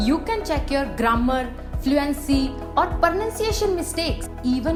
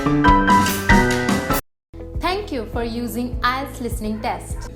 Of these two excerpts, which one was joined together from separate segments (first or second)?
second